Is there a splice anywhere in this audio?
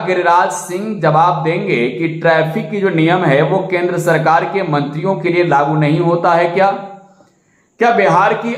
no; 0 cuts

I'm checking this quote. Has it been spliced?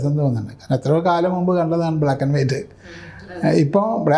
no; 0 cuts

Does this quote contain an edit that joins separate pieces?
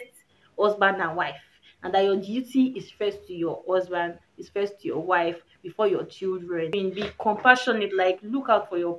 yes; 1 cut; at 6.7 s

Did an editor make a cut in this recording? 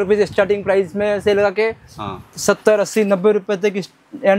no; 0 cuts

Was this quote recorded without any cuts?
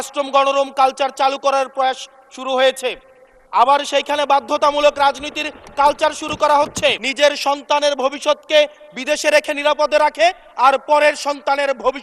no; 1 cut; at 7.0 s

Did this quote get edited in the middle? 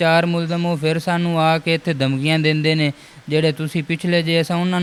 no; 0 cuts

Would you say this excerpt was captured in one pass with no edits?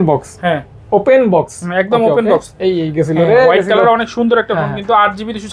yes; 0 cuts

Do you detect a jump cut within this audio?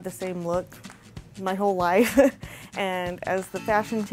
no; 0 cuts

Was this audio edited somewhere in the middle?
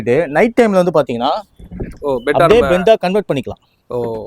no; 0 cuts

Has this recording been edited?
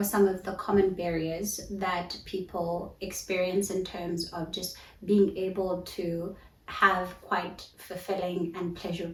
no; 0 cuts

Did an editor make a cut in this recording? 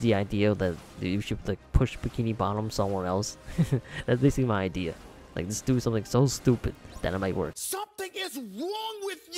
no; 0 cuts

